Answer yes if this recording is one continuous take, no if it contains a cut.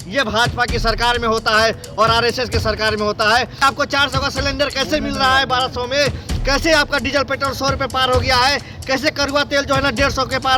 no